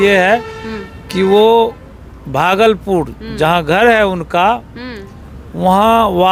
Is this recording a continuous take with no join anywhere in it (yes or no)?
yes